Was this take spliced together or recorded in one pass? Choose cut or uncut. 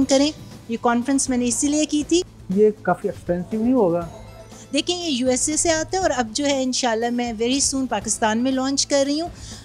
uncut